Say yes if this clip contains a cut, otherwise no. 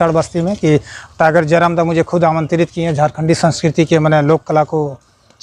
no